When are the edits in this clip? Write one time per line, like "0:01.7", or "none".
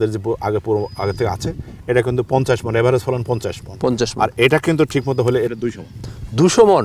none